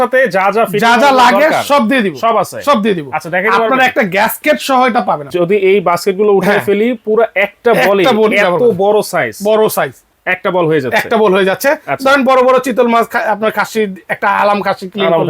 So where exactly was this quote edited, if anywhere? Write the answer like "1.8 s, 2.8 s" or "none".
5.3 s